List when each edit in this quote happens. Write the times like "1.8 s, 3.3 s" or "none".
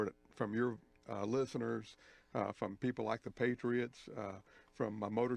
1.4 s